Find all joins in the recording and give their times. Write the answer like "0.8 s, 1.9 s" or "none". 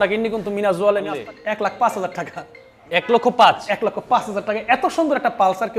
1.1 s